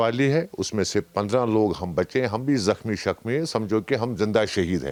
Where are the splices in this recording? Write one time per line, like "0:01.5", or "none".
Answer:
none